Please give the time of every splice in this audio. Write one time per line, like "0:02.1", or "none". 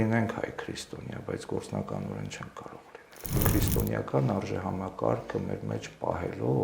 0:03.4